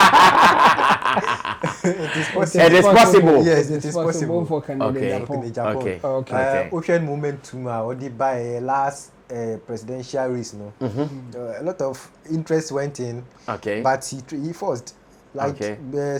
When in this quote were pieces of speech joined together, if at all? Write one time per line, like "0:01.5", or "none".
none